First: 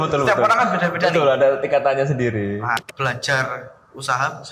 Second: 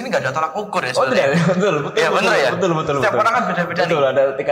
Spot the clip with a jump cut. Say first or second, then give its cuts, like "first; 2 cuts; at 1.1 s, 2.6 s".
first; 1 cut; at 2.8 s